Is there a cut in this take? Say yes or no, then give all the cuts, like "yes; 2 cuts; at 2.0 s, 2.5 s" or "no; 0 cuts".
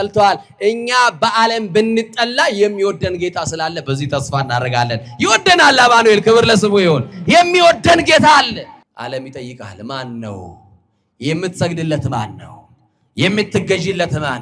yes; 1 cut; at 8.8 s